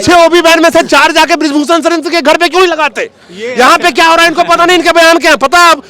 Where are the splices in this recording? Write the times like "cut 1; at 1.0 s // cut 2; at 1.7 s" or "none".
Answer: none